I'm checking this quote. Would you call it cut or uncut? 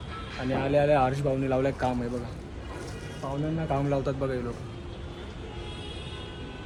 uncut